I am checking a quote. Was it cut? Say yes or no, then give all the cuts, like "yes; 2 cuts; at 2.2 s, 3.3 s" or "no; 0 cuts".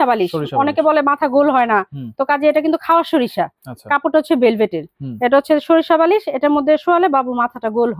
no; 0 cuts